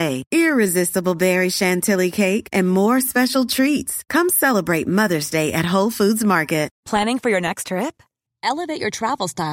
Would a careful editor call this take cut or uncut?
cut